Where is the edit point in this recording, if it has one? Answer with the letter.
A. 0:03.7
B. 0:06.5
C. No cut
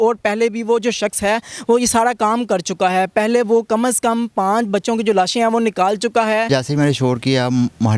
B